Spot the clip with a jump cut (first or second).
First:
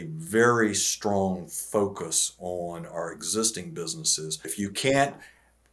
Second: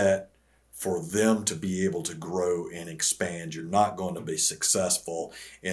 first